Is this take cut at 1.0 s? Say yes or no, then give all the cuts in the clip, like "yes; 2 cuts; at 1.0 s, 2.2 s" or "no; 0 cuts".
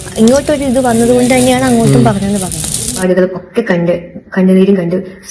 no; 1 cut; at 3.0 s